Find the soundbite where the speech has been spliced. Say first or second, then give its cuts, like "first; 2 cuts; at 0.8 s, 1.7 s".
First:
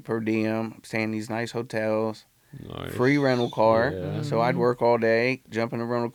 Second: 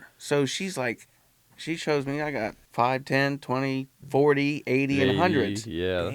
second; 2 cuts; at 2.6 s, 4.0 s